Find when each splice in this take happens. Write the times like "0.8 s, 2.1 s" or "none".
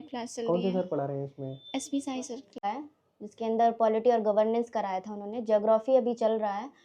2.6 s

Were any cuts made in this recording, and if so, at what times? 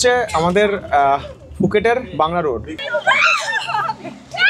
2.8 s

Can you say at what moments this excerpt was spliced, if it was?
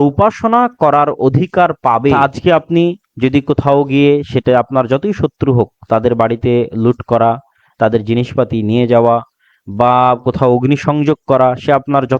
2.1 s

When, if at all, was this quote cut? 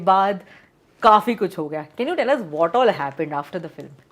none

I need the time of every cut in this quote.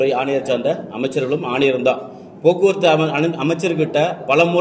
none

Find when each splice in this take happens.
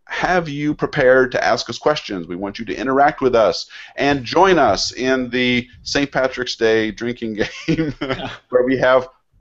none

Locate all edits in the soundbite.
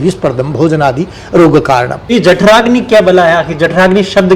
2.1 s

